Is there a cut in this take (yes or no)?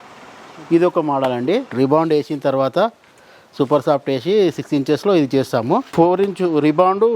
yes